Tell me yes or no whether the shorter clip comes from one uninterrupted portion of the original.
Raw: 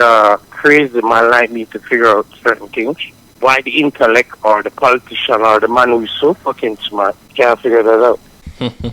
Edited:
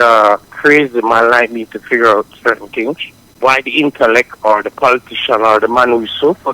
yes